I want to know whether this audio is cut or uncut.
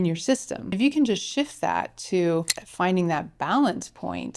cut